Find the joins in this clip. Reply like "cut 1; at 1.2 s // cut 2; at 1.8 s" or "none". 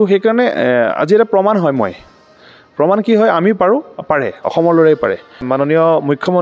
cut 1; at 5.4 s